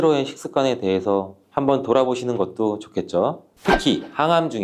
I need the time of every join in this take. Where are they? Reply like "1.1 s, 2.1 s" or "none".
3.5 s